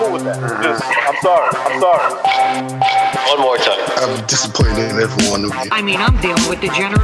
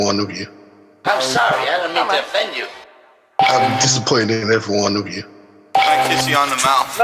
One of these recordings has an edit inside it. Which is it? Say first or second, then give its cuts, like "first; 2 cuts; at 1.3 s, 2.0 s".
second; 1 cut; at 0.9 s